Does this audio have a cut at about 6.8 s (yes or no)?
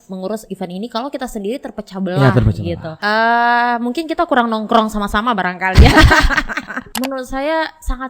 yes